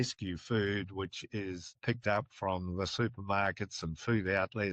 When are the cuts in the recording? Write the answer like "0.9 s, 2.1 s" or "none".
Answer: 1.8 s